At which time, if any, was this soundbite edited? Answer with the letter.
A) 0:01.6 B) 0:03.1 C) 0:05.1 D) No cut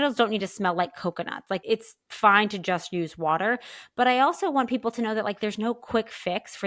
A